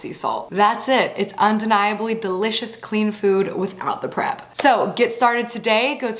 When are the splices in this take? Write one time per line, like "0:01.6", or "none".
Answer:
none